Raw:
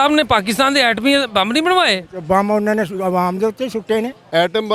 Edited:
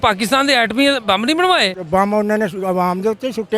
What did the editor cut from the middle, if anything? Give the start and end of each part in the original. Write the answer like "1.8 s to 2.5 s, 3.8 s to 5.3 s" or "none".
2.0 s to 2.1 s